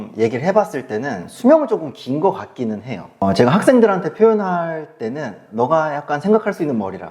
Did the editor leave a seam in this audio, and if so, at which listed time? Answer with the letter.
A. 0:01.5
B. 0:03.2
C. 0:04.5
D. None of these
B